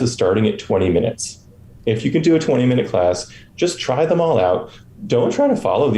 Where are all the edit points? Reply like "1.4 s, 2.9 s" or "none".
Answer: none